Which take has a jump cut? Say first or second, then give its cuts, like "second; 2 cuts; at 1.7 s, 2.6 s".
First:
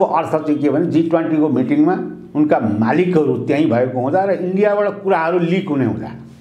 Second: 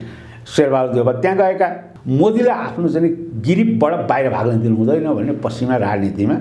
second; 1 cut; at 1.9 s